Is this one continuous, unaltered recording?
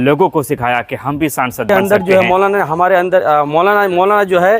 no; 1 cut; at 1.7 s

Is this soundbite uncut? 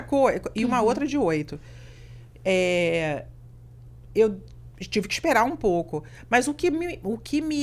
yes; 0 cuts

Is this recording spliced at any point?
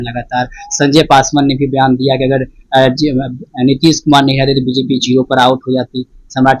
no; 0 cuts

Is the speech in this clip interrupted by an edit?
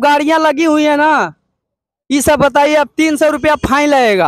no; 0 cuts

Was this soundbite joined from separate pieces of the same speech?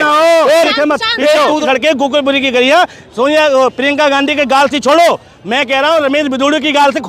yes; 1 cut; at 1.6 s

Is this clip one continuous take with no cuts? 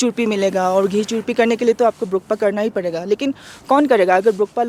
yes; 0 cuts

